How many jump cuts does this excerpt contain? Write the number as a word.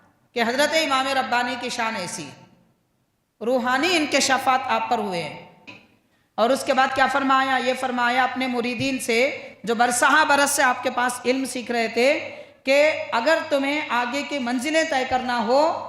one